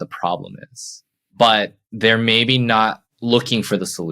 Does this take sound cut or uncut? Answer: cut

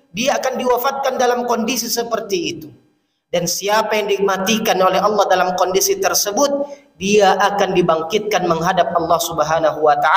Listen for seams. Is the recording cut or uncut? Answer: cut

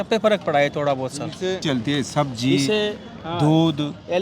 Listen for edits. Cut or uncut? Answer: cut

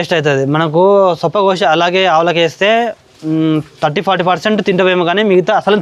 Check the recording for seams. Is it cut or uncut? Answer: uncut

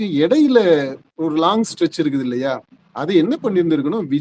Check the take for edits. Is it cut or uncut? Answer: uncut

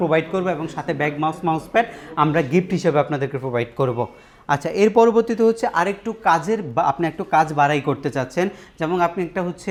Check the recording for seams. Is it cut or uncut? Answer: uncut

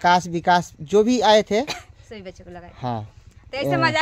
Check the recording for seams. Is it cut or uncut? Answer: uncut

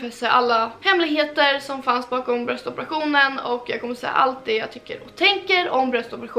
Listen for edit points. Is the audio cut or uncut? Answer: uncut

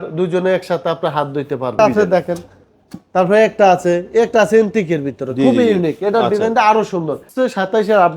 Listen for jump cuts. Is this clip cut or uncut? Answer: cut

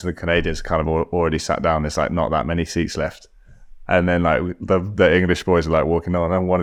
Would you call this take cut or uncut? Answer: uncut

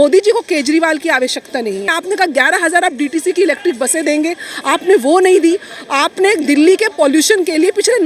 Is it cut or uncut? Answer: cut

